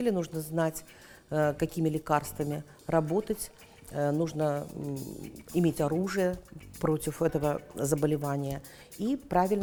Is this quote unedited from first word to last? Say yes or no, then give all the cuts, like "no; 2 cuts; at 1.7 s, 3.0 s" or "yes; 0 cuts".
yes; 0 cuts